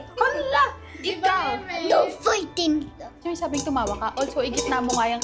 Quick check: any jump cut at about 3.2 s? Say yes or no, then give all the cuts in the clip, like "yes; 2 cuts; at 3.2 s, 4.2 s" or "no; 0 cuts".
yes; 1 cut; at 3.2 s